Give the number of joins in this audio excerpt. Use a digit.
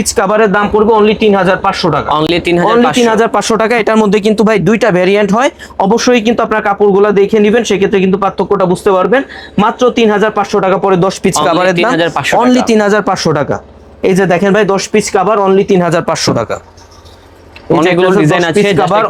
0